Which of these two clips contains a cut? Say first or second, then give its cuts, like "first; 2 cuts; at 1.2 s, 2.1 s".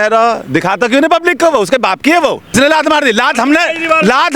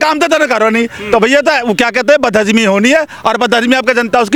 first; 1 cut; at 2.5 s